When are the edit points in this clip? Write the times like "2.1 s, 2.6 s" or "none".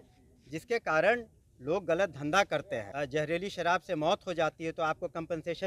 2.9 s

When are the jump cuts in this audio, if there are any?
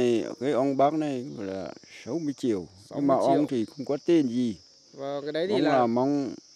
none

